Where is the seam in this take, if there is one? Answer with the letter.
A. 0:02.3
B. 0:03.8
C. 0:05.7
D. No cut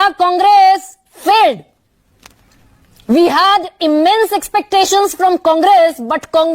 D